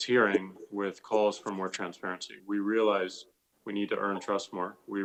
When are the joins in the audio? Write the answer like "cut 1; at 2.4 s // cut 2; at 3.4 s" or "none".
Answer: none